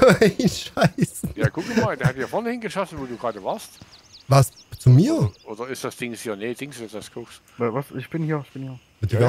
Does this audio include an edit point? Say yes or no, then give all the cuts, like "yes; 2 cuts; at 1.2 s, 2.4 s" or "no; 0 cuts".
no; 0 cuts